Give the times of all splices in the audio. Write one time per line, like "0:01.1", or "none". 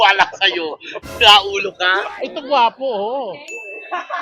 0:02.2